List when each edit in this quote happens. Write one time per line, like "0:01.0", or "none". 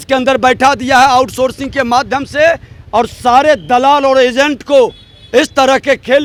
none